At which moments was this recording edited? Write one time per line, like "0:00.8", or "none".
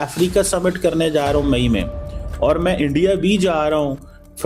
none